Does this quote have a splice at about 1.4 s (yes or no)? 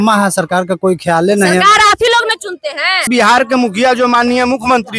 no